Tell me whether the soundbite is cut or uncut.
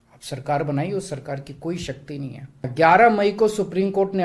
uncut